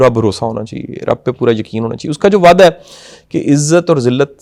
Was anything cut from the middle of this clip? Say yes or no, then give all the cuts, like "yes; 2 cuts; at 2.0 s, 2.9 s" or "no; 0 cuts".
no; 0 cuts